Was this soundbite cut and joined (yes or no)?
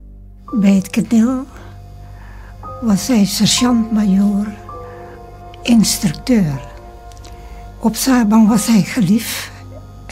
yes